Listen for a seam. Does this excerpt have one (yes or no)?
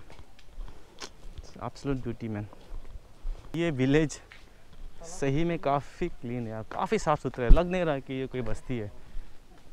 yes